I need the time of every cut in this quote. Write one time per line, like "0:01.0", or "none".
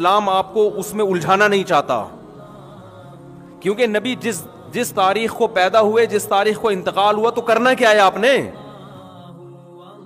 0:09.1